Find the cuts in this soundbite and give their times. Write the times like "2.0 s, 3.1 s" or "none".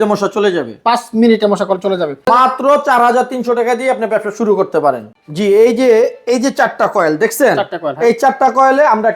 2.2 s, 5.1 s